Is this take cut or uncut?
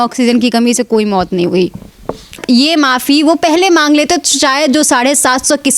cut